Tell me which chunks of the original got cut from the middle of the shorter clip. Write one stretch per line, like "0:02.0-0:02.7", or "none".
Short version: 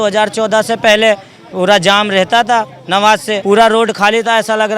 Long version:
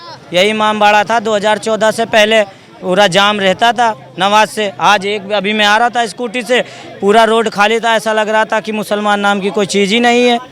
0:04.6-0:06.9